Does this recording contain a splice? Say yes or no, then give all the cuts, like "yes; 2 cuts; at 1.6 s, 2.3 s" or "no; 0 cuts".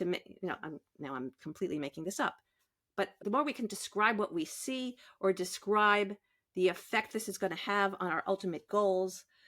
yes; 1 cut; at 3.1 s